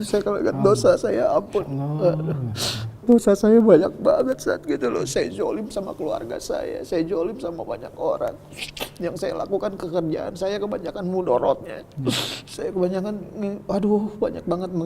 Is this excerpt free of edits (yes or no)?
no